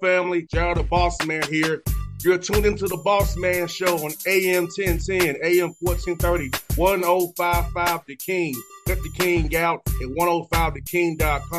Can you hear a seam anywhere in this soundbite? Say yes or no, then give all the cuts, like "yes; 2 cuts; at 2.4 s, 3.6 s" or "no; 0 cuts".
no; 0 cuts